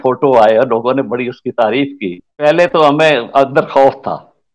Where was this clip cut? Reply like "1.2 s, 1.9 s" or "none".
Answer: 2.3 s